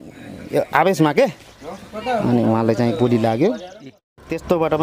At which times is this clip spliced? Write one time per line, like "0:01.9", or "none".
0:03.9